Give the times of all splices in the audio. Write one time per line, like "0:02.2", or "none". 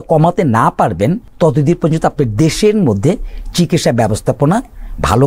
0:01.3